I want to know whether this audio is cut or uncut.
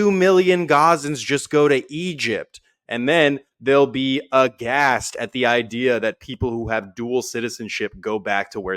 uncut